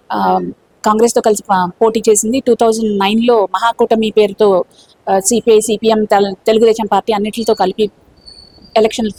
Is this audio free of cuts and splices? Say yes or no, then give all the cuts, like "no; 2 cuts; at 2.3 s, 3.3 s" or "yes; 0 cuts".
yes; 0 cuts